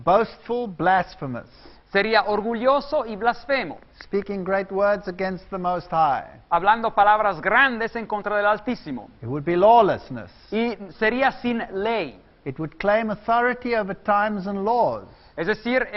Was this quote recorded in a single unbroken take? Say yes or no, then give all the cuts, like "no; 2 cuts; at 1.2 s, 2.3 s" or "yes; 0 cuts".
no; 1 cut; at 9.0 s